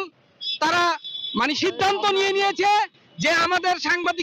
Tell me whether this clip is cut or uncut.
uncut